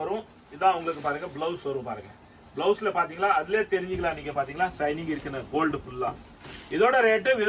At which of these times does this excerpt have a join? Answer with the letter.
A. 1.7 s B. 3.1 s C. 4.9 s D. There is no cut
D